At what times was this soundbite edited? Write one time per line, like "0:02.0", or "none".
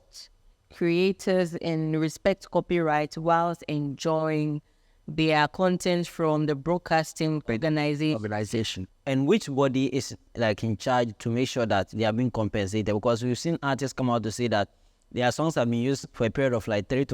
0:07.5
0:08.8